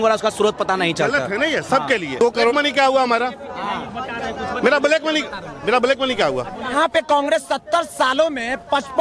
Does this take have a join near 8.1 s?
no; 2 cuts; at 2.4 s, 6.7 s

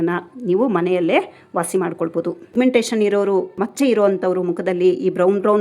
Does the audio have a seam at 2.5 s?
yes; 1 cut; at 2.5 s

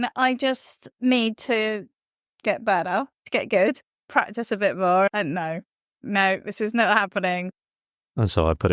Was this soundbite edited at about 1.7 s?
no; 4 cuts; at 3.2 s, 4.1 s, 6.0 s, 7.5 s

